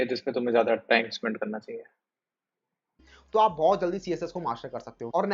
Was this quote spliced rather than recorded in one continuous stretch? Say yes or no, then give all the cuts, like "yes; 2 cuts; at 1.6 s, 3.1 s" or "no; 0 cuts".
yes; 1 cut; at 3.1 s